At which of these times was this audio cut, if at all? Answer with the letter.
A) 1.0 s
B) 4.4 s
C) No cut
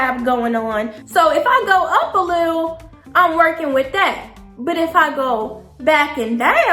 A